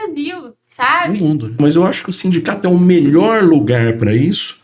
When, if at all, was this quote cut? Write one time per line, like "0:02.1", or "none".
0:01.6